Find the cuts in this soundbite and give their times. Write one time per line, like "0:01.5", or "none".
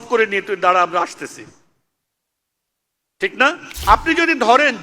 0:03.7